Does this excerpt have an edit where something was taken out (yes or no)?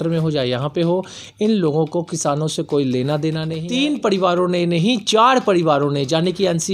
yes